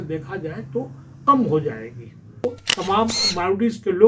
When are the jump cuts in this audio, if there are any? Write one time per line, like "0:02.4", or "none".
0:02.6

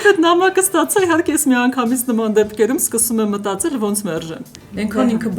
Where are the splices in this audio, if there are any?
0:04.5

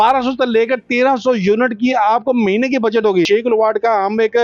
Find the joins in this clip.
0:03.3

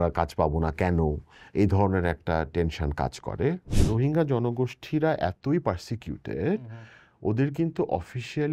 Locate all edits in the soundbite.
0:03.9

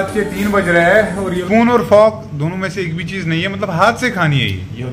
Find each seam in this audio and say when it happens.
0:01.3

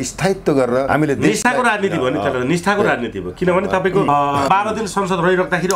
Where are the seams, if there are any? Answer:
0:00.9
0:04.5

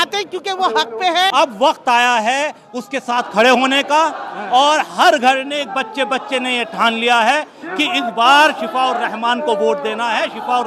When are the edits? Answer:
0:01.3

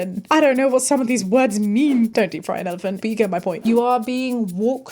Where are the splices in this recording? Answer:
0:02.1
0:03.6

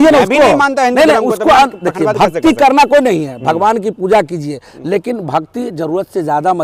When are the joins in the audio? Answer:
none

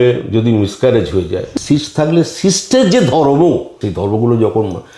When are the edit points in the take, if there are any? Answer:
0:01.5
0:03.8

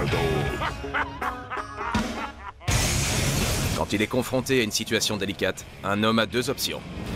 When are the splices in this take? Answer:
none

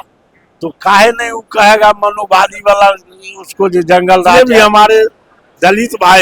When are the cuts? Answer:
0:04.3

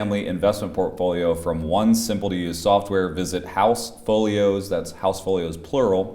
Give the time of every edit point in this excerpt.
none

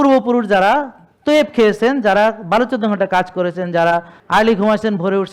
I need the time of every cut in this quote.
0:04.2

